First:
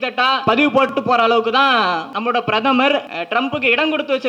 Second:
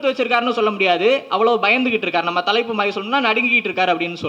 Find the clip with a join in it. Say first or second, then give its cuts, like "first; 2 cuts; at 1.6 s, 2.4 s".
first; 3 cuts; at 0.9 s, 2.1 s, 3.2 s